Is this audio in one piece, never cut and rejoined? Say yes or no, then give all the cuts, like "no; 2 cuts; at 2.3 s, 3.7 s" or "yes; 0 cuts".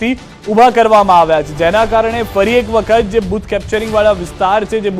no; 1 cut; at 1.9 s